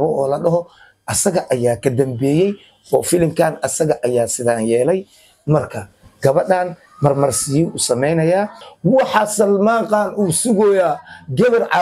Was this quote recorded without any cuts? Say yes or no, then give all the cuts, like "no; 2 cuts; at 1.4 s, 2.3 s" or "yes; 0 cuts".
no; 1 cut; at 8.6 s